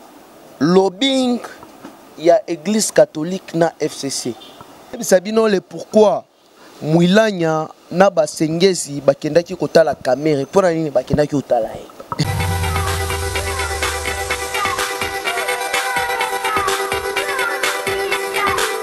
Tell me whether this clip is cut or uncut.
cut